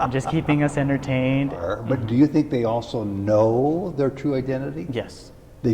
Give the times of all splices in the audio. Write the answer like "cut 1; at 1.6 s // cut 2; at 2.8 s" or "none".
cut 1; at 1.6 s